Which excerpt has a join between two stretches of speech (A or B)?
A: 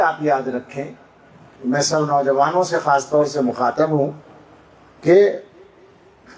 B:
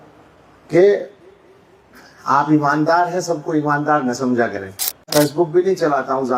B